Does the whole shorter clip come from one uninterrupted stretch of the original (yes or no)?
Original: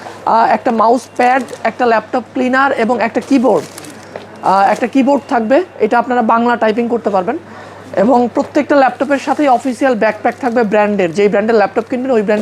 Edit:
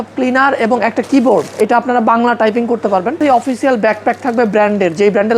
no